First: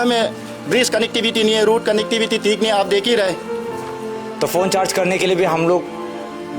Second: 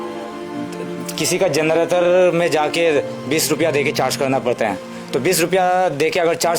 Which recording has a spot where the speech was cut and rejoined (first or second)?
first